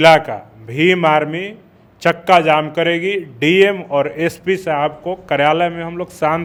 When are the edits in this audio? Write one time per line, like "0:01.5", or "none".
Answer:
none